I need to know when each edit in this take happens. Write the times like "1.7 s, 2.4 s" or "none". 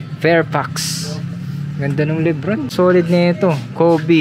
2.7 s